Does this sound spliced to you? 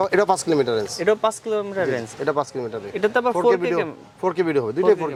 no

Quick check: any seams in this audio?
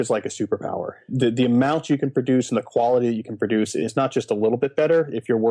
yes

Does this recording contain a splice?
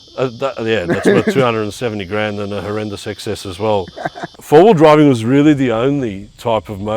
yes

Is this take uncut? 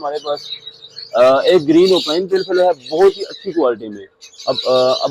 yes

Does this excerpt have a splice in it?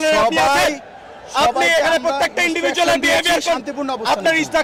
no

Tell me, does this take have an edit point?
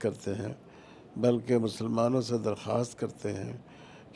no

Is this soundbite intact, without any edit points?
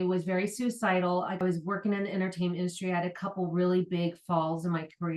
yes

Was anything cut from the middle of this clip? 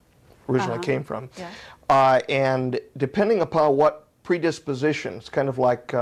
no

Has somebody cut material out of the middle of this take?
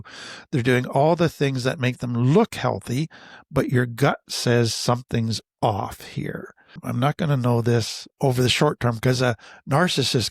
yes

